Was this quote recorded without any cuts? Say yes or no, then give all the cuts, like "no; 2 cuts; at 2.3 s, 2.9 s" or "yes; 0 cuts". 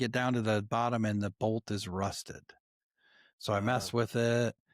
yes; 0 cuts